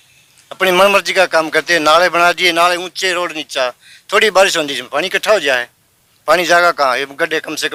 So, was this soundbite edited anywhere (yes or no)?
no